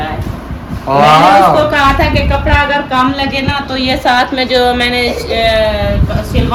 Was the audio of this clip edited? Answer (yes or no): no